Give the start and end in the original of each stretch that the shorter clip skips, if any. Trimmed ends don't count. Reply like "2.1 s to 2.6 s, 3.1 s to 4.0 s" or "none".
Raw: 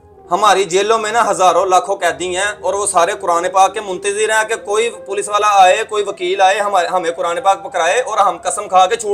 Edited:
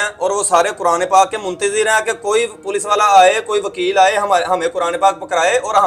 none

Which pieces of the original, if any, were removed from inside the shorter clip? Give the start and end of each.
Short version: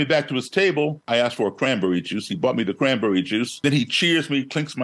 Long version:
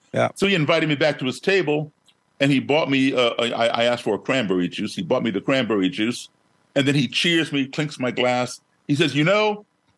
2.0 s to 3.7 s, 6.3 s to 6.8 s

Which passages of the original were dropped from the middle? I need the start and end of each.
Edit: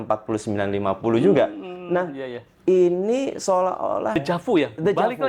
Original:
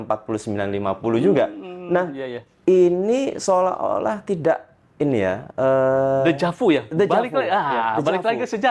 4.2 s to 6.3 s

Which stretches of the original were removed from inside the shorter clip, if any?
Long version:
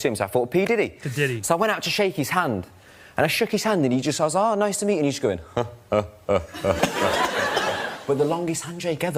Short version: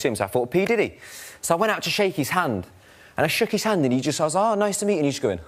none

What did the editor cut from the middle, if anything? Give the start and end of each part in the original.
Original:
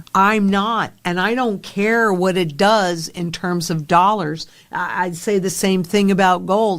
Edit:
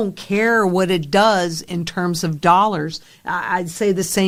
none

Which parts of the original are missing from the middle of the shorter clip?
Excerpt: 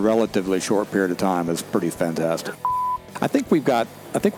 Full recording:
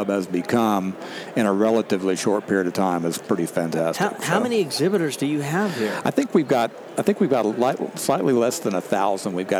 4.3 s to 5.5 s

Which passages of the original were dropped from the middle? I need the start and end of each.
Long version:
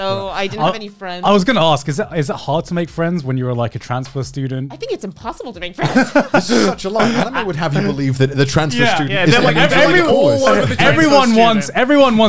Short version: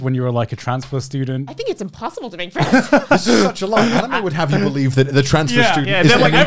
none

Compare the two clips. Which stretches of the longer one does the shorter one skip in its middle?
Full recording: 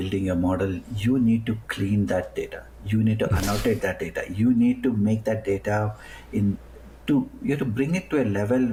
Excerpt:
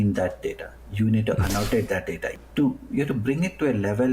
4.2 s to 6.8 s

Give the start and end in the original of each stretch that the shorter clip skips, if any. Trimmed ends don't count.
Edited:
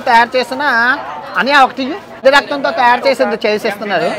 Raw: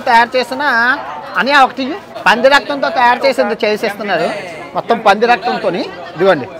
2.2 s to 2.4 s

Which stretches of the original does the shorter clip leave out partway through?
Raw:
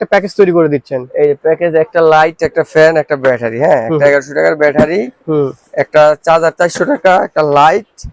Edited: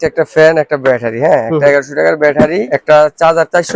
5.1 s to 5.8 s

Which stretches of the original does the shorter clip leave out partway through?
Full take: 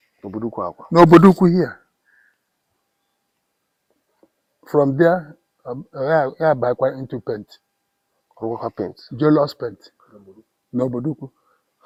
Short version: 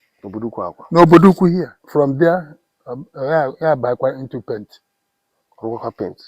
1.8 s to 4.6 s

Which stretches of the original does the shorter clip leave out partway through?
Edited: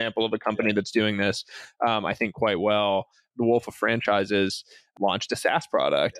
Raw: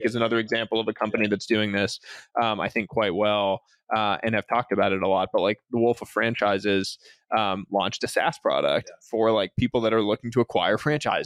3.8 s to 5.6 s, 7.2 s to 7.6 s

